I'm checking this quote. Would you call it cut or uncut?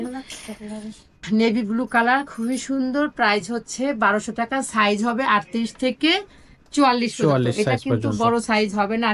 uncut